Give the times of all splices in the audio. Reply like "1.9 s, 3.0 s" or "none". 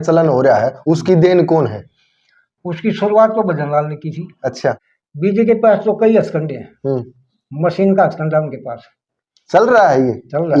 4.8 s